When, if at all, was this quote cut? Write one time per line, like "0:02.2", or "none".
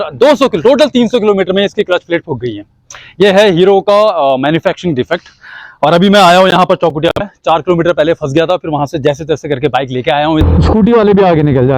0:10.4